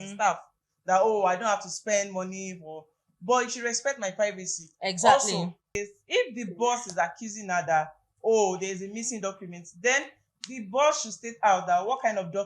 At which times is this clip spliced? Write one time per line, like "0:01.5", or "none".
0:05.8